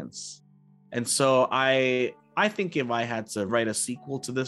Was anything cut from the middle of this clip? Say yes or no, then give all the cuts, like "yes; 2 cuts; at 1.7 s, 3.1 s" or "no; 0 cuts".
yes; 2 cuts; at 2.2 s, 3.5 s